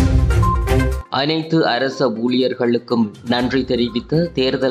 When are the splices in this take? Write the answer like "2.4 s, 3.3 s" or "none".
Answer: 1.1 s